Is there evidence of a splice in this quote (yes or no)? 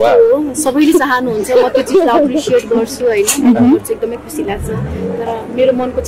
no